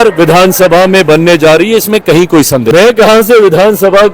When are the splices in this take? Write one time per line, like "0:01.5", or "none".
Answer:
0:02.7

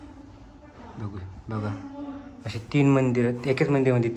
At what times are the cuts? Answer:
none

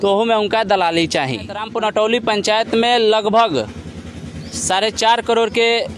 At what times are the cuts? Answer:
0:01.7

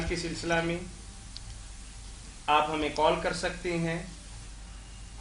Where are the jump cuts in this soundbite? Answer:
0:02.7

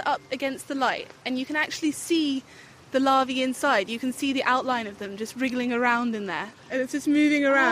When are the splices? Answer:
0:06.6

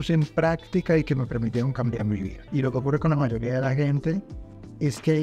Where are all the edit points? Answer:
0:02.4

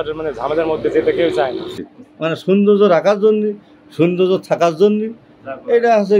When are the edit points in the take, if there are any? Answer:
0:01.7

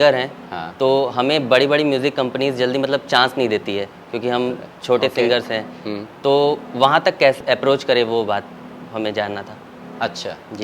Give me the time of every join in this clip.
0:07.4

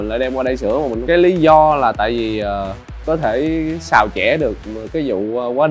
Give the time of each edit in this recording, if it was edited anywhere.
0:01.0
0:03.0

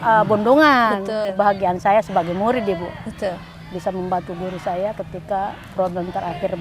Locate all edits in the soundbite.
0:01.1

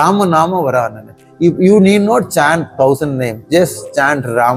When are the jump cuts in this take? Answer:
none

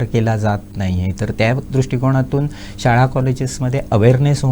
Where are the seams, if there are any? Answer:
none

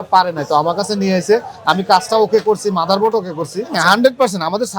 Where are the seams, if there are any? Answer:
0:03.8

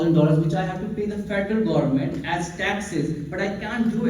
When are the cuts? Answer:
none

